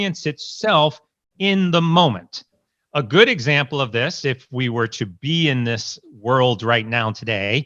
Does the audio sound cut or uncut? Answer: uncut